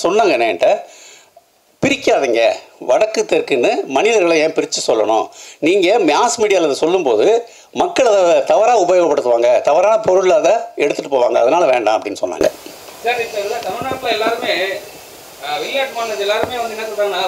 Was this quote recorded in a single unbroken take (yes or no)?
yes